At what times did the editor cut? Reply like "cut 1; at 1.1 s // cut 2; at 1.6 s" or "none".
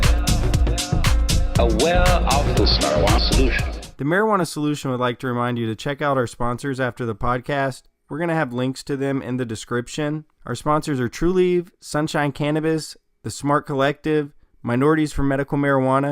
cut 1; at 3.9 s